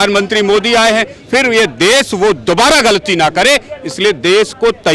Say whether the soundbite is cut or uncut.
uncut